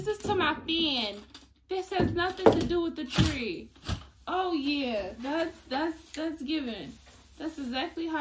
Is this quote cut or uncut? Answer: cut